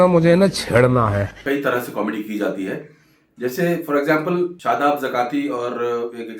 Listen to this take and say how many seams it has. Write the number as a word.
two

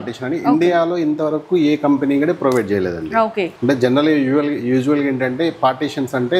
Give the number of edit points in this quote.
zero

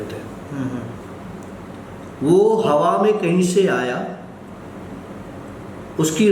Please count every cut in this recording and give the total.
zero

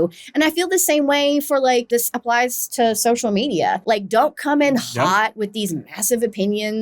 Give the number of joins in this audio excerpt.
two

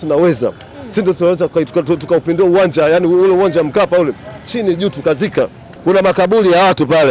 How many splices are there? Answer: one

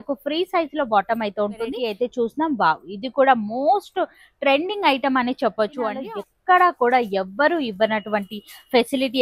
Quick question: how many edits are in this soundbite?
two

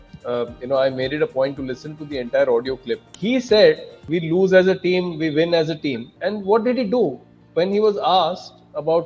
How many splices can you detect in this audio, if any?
three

